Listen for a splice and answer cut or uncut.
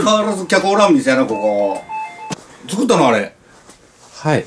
cut